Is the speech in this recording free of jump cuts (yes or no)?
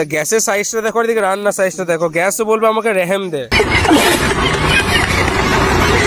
yes